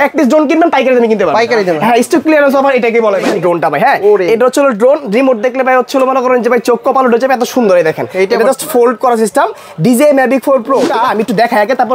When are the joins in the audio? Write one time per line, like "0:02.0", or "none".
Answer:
0:03.3
0:10.9